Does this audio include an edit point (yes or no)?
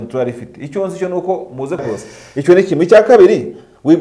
yes